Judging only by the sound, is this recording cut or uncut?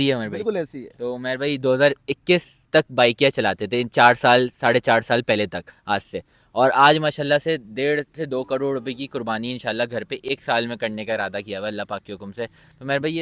uncut